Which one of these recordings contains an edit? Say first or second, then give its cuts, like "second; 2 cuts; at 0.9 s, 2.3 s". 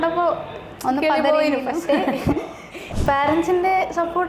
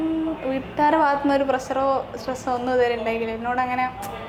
first; 1 cut; at 2.9 s